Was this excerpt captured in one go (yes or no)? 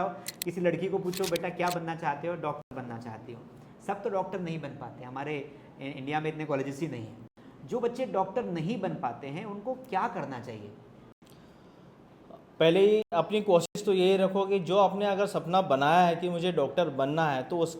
yes